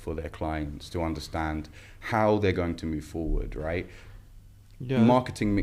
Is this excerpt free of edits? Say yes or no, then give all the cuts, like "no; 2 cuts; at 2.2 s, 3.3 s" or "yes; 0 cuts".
yes; 0 cuts